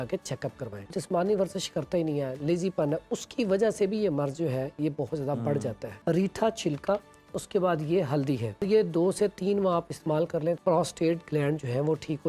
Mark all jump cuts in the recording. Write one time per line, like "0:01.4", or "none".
0:00.9
0:05.9
0:08.6
0:10.6